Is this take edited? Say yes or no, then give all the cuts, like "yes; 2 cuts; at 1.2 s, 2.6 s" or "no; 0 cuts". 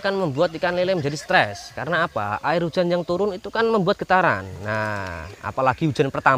no; 0 cuts